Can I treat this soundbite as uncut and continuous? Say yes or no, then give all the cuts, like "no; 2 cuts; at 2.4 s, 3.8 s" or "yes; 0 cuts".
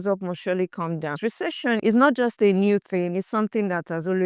no; 1 cut; at 1.2 s